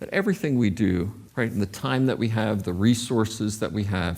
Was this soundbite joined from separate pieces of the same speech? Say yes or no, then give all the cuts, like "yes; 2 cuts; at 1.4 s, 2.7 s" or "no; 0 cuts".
yes; 1 cut; at 1.2 s